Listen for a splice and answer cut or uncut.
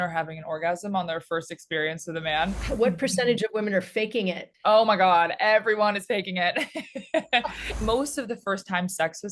cut